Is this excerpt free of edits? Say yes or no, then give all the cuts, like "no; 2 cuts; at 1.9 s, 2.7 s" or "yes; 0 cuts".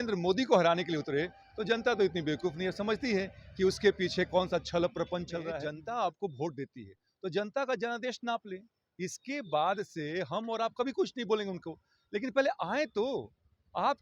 no; 1 cut; at 5.6 s